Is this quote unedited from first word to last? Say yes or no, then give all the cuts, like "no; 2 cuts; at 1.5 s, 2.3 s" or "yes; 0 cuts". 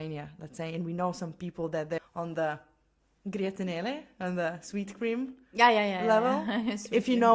no; 1 cut; at 2.0 s